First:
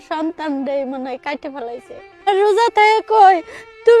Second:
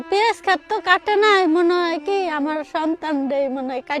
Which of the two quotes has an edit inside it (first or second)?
first